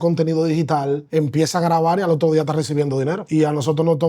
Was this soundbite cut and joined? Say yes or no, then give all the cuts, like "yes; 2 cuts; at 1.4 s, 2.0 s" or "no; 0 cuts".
yes; 2 cuts; at 1.0 s, 3.2 s